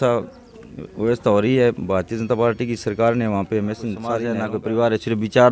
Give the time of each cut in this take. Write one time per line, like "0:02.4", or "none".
0:04.3